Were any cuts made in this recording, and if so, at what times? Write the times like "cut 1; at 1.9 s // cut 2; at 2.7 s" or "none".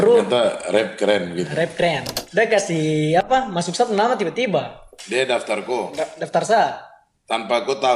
cut 1; at 2.1 s